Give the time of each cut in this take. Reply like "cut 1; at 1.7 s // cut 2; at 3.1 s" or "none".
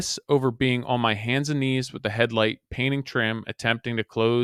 none

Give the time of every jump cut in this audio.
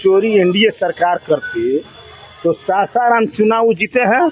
none

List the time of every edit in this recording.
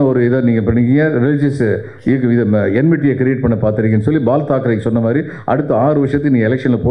none

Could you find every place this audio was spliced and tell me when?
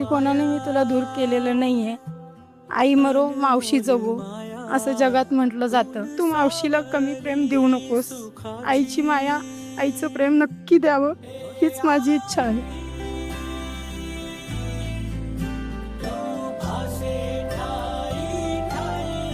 cut 1; at 6.2 s // cut 2; at 12.7 s

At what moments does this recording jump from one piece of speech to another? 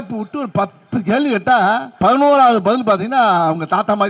cut 1; at 1.9 s

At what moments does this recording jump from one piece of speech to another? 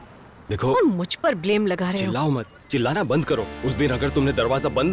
cut 1; at 3.5 s

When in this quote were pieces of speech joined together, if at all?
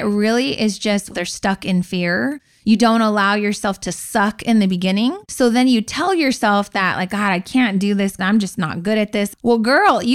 cut 1; at 1.1 s // cut 2; at 2.5 s // cut 3; at 5.2 s // cut 4; at 8.2 s // cut 5; at 9.3 s

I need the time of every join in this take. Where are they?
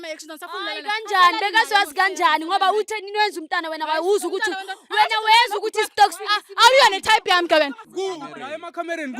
cut 1; at 7.8 s

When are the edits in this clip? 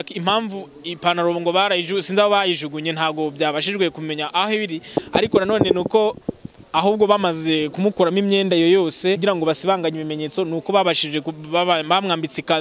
cut 1; at 9.2 s

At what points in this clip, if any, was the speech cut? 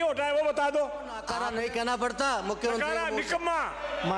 cut 1; at 1.3 s

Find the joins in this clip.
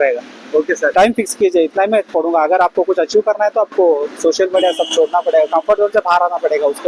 cut 1; at 0.9 s

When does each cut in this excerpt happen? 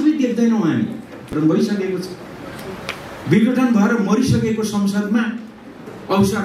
cut 1; at 1.3 s

